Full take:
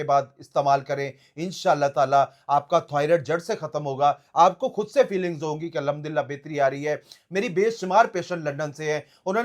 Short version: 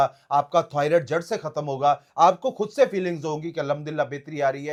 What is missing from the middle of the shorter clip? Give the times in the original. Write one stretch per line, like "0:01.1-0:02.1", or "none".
none